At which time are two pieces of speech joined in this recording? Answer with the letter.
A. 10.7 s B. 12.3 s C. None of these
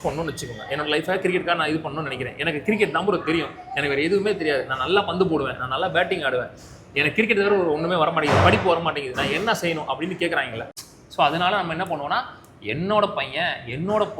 A